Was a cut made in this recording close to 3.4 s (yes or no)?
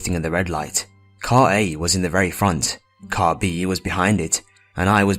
yes